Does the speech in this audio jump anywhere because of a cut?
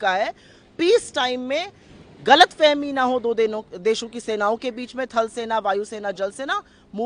no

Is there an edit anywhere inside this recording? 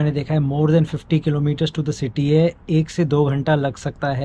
no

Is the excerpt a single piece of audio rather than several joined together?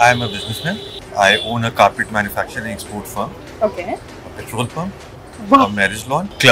yes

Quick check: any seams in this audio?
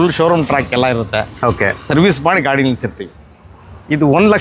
yes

